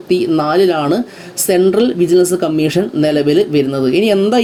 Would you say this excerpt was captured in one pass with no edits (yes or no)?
yes